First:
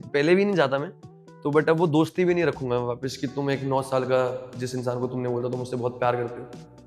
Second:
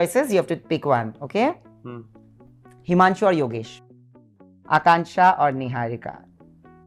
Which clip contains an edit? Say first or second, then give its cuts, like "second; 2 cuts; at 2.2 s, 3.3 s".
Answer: second; 1 cut; at 4.0 s